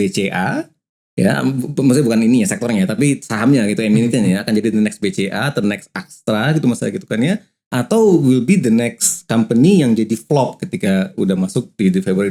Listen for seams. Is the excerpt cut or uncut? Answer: uncut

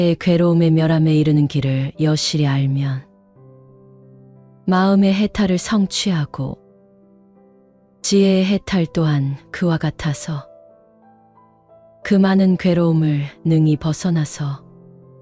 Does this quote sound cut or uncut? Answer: cut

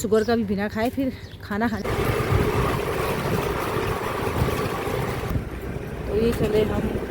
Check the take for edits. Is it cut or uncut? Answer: cut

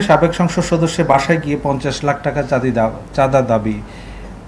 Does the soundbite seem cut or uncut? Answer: uncut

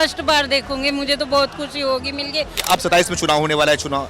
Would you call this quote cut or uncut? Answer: cut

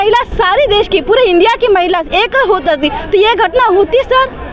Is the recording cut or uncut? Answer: uncut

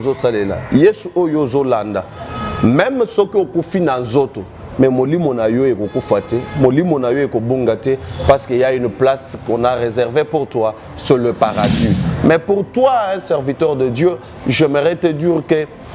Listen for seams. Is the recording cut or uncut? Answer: uncut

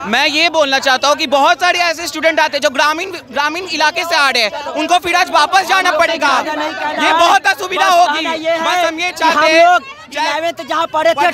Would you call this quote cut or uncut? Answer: uncut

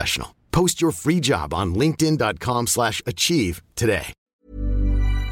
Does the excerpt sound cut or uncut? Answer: cut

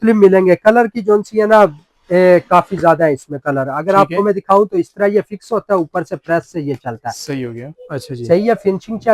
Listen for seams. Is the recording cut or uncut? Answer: cut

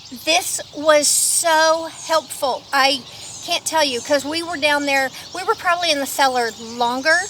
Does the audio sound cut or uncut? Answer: uncut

